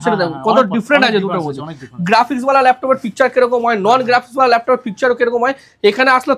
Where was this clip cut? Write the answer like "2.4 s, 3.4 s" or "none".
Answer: none